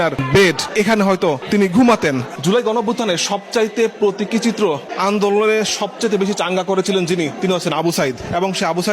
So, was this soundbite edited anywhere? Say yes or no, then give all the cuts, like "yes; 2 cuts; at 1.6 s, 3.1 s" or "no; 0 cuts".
yes; 1 cut; at 2.3 s